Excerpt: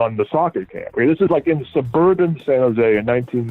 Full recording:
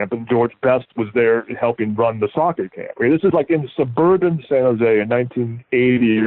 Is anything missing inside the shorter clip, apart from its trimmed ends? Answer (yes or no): no